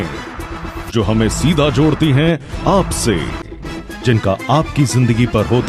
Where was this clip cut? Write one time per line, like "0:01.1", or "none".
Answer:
none